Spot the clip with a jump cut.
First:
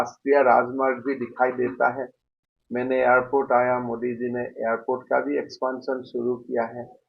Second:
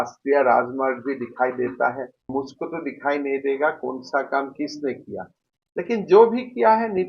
second; 1 cut; at 2.3 s

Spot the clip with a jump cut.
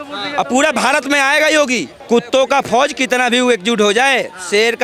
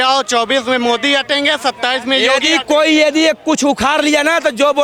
first; 1 cut; at 1.9 s

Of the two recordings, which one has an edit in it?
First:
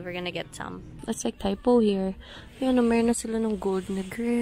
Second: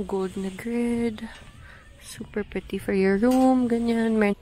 first; 1 cut; at 1.0 s

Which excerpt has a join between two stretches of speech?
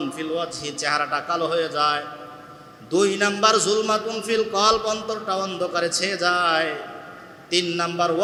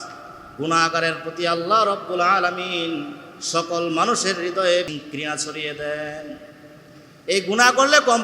second; 1 cut; at 4.9 s

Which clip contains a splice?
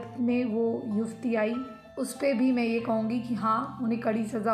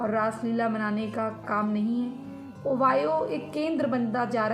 second; 1 cut; at 2.6 s

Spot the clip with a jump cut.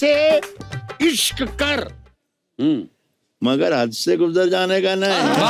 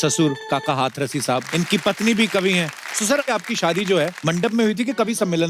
second; 3 cuts; at 1.4 s, 3.2 s, 4.2 s

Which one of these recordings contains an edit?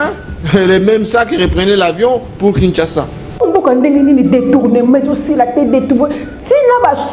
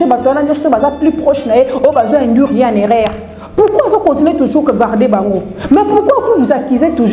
first; 1 cut; at 3.4 s

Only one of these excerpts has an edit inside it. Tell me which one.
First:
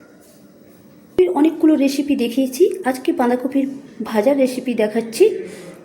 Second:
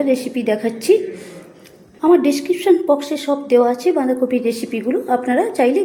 first; 1 cut; at 1.1 s

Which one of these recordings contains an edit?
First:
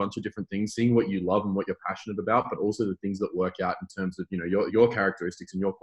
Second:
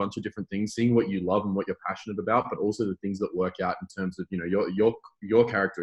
first; 1 cut; at 4.7 s

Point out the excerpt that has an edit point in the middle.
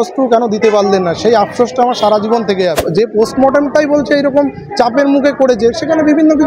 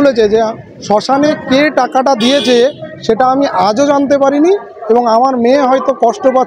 first; 1 cut; at 2.9 s

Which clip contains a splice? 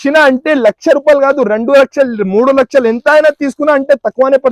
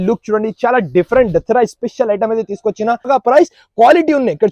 second; 1 cut; at 3.1 s

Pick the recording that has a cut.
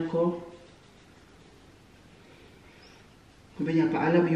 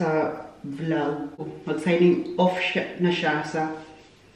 second; 1 cut; at 1.4 s

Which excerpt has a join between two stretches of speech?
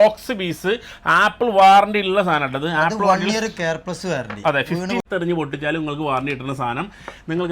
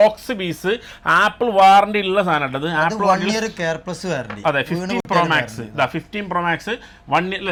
first; 1 cut; at 5.1 s

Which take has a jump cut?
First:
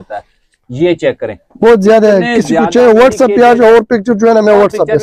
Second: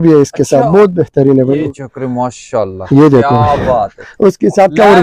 second; 1 cut; at 1.7 s

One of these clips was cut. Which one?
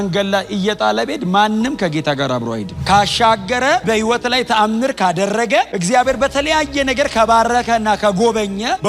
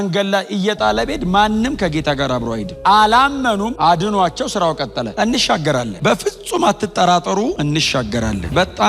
first; 1 cut; at 2.7 s

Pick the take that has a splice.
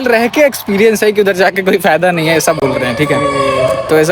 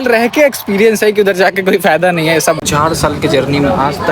second; 1 cut; at 2.6 s

